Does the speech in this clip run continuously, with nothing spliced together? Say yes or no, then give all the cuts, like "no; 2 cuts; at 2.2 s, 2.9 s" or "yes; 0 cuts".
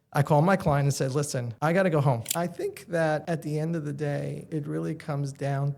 no; 4 cuts; at 1.4 s, 2.3 s, 3.2 s, 4.5 s